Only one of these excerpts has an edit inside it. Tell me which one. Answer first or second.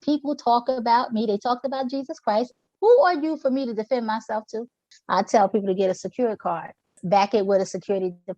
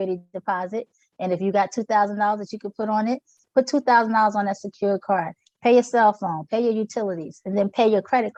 first